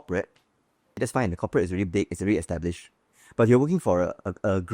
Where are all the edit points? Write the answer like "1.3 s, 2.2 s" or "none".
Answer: 0.9 s